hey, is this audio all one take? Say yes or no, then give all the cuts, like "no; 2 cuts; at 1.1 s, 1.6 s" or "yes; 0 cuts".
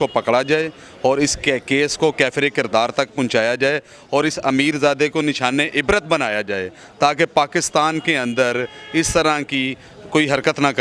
yes; 0 cuts